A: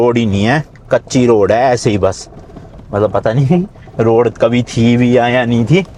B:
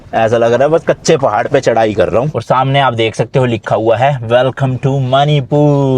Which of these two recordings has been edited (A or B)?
B